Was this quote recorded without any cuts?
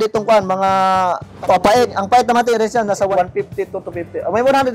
no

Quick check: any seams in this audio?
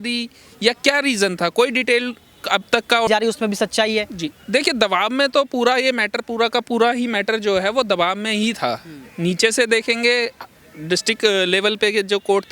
yes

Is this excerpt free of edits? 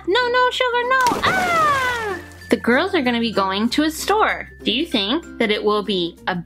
no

